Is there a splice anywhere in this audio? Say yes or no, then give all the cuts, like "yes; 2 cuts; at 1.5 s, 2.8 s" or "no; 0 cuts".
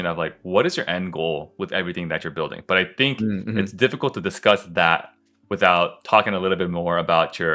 no; 0 cuts